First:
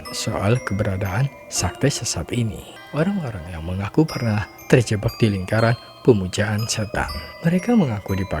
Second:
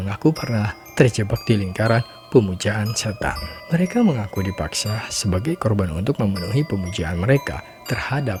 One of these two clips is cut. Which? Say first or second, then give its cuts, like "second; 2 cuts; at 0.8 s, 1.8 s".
first; 1 cut; at 2.8 s